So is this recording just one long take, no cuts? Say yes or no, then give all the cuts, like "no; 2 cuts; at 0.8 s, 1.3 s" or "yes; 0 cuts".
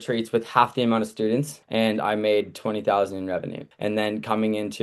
no; 2 cuts; at 1.6 s, 3.7 s